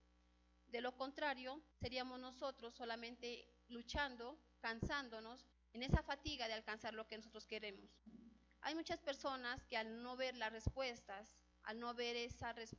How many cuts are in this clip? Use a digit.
1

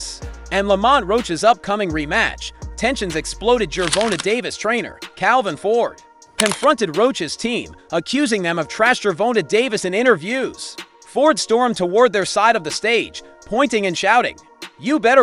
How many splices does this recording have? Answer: 1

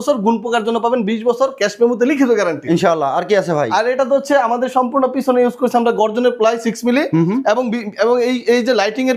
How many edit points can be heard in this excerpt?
0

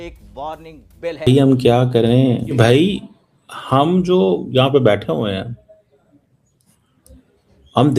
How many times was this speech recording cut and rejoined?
1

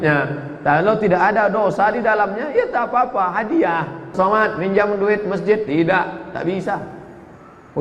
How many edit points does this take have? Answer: 1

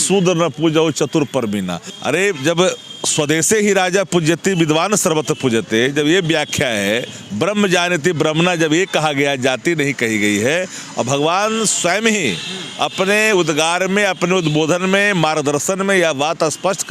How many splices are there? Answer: 1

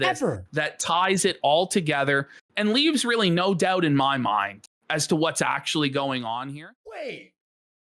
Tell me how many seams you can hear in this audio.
1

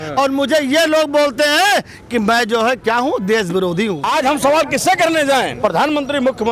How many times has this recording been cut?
2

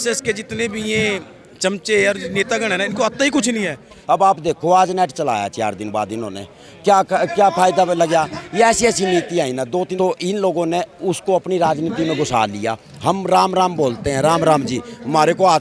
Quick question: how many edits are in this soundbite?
2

